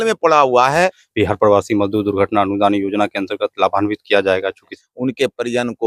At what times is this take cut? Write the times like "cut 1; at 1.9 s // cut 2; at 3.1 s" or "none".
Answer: cut 1; at 1.0 s // cut 2; at 4.7 s